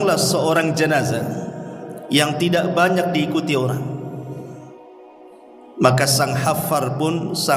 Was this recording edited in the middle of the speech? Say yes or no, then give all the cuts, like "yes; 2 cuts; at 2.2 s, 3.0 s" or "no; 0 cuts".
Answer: yes; 2 cuts; at 4.5 s, 5.8 s